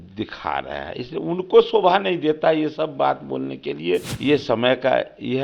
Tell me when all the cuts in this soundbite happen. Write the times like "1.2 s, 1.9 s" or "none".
4.1 s